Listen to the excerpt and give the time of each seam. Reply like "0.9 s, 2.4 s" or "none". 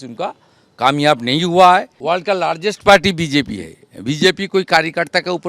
1.9 s